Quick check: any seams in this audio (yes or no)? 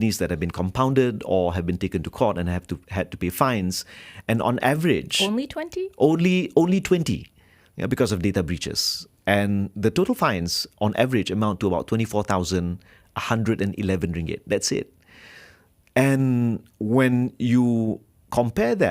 no